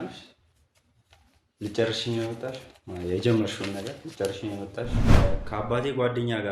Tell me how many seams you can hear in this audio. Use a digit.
1